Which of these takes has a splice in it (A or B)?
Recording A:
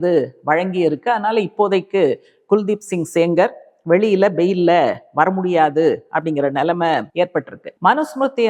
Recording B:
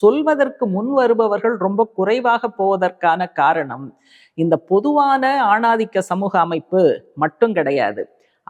A